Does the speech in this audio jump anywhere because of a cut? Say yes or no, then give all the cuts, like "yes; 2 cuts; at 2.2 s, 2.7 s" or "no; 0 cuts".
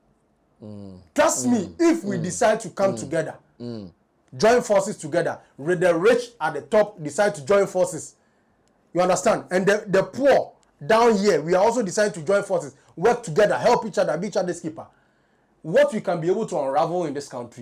no; 0 cuts